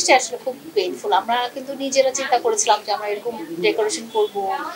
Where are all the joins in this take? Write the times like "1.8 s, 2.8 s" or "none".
none